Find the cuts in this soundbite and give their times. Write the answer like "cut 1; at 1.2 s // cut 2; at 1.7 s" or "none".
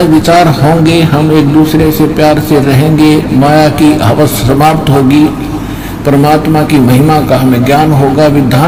none